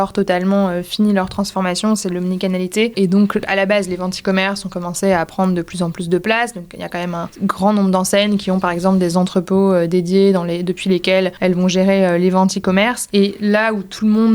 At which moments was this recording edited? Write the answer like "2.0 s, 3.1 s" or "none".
3.3 s, 7.3 s, 11.3 s, 13.0 s